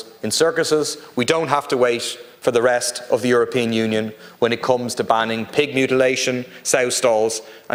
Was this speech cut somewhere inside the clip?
no; 0 cuts

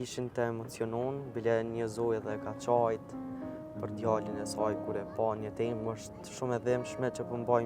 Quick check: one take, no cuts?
yes; 0 cuts

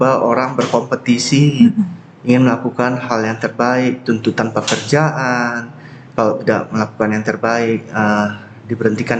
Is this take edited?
no; 0 cuts

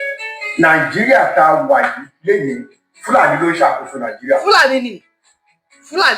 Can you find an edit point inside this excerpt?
no; 0 cuts

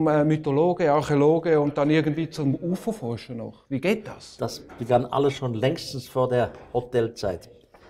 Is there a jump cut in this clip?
yes; 1 cut; at 3.0 s

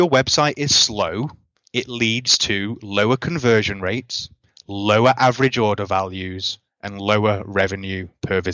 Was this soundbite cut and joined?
no; 0 cuts

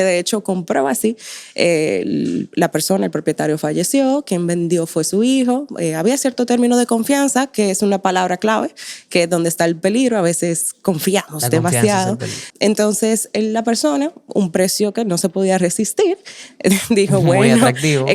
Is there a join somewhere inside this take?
yes; 1 cut; at 12.4 s

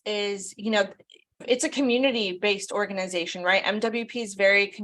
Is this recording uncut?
no; 1 cut; at 1.4 s

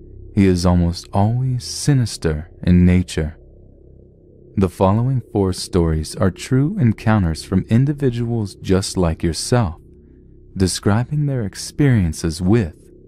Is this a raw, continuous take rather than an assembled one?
yes; 0 cuts

